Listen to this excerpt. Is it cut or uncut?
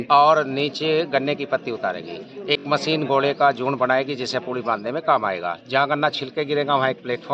uncut